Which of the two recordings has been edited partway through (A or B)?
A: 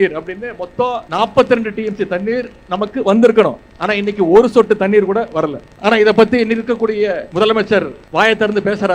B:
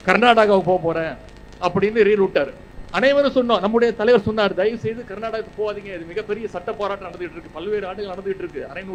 A